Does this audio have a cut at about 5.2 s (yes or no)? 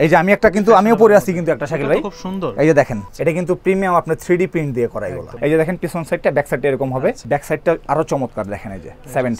yes